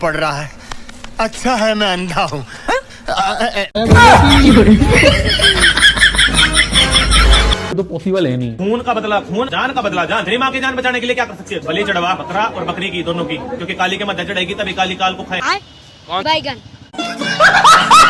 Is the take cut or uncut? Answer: cut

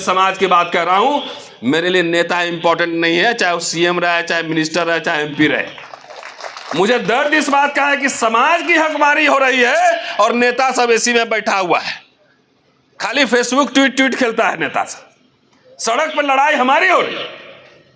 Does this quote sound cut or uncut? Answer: uncut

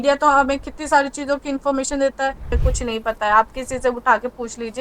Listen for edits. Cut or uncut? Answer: cut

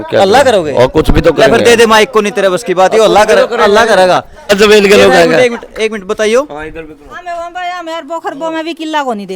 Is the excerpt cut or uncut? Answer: cut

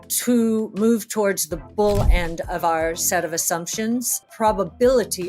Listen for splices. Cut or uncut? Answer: cut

